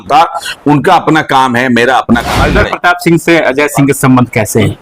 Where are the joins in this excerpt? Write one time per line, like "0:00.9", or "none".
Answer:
0:02.4